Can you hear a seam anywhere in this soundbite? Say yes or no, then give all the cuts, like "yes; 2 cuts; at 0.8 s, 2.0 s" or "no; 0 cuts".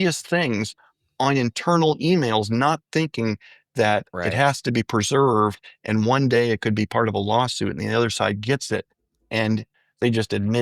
yes; 1 cut; at 9.7 s